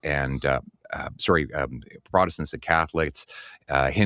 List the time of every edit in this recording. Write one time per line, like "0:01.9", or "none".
0:03.1

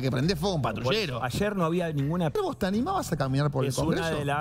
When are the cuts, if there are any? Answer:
0:02.4

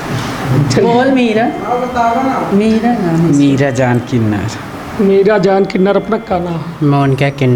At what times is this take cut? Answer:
none

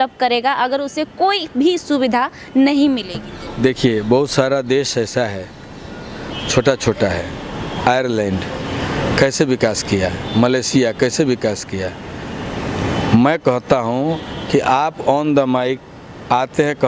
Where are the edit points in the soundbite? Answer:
none

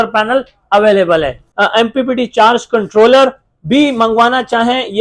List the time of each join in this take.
0:01.4

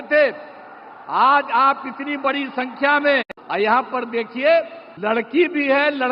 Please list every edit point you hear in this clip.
0:03.4
0:04.8

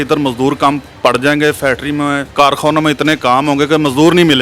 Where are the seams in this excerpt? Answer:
0:00.9
0:02.3

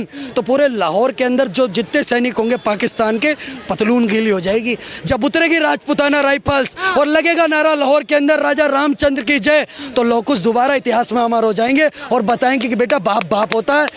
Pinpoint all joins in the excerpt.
none

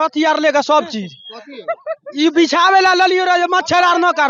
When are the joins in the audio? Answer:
none

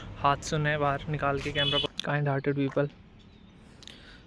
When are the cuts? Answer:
0:01.8

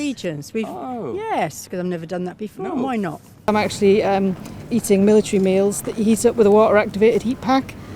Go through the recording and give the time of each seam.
none

